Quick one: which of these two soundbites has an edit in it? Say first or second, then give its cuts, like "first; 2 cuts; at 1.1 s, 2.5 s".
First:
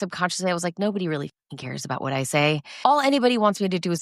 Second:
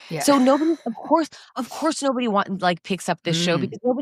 first; 1 cut; at 2.7 s